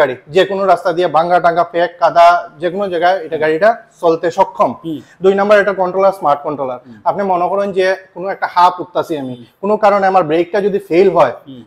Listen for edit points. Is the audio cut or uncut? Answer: uncut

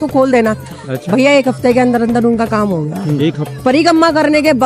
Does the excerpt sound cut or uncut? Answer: cut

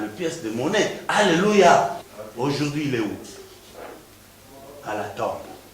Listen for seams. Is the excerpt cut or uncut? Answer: cut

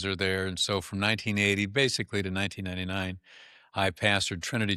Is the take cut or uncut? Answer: uncut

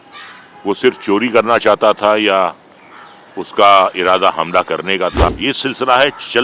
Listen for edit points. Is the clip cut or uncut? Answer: cut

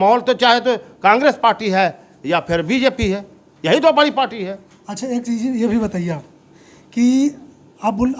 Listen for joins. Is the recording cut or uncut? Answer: uncut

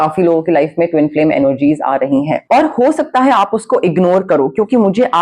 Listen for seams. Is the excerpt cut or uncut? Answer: cut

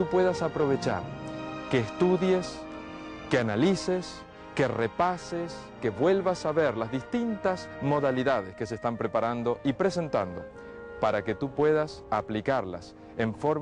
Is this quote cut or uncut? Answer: cut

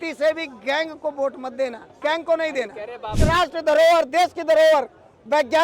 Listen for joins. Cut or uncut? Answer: cut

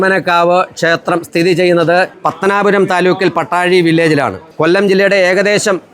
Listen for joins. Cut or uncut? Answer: uncut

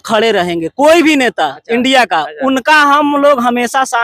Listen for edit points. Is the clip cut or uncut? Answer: uncut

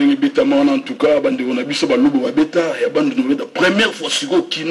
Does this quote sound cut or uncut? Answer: uncut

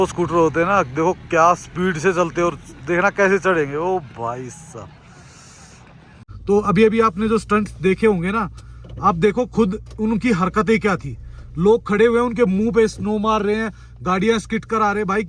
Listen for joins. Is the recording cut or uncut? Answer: cut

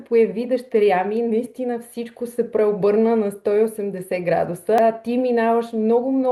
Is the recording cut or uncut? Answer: cut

